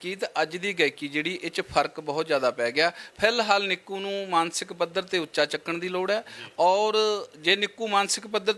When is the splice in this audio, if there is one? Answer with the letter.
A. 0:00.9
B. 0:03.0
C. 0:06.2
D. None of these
D